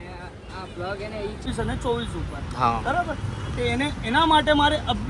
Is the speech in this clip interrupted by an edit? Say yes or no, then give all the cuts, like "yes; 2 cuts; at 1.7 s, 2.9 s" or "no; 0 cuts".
yes; 1 cut; at 1.5 s